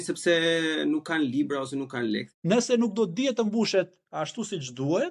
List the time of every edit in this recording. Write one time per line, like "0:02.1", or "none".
0:02.3